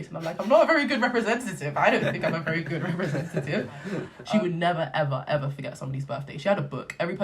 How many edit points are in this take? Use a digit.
1